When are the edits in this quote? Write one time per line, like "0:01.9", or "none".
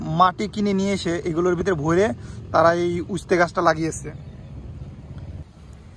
none